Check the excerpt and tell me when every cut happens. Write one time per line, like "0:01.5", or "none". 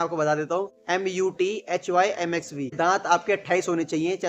0:02.7